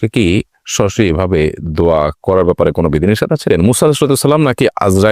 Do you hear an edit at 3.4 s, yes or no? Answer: yes